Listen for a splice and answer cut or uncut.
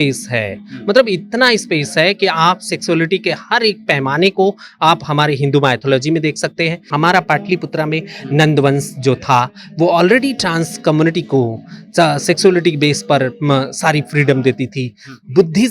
cut